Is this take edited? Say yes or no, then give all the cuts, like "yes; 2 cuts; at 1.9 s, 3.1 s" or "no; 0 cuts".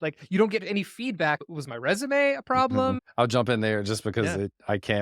yes; 2 cuts; at 1.4 s, 3.0 s